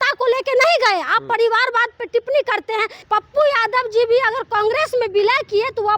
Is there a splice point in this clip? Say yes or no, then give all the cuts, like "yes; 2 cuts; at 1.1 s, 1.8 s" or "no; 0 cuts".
yes; 1 cut; at 3.0 s